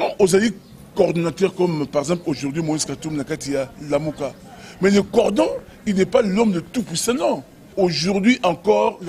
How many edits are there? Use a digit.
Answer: 1